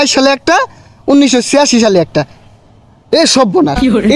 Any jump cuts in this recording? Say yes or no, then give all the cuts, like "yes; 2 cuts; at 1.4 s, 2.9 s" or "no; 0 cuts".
no; 0 cuts